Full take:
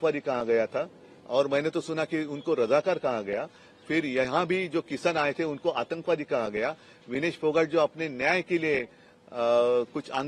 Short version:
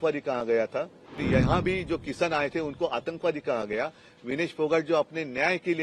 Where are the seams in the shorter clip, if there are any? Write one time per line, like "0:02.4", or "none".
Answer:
0:01.2